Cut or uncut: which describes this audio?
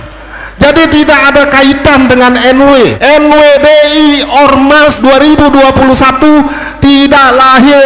cut